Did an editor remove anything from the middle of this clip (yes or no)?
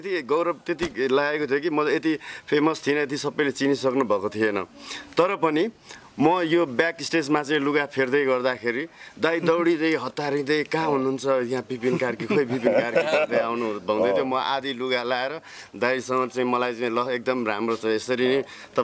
no